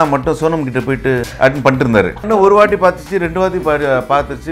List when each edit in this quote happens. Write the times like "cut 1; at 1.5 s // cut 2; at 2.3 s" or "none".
cut 1; at 1.3 s // cut 2; at 2.3 s